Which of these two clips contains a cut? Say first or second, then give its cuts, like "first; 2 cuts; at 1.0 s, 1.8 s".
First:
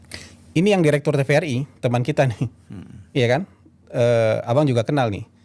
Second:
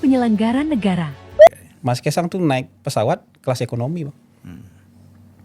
second; 1 cut; at 1.5 s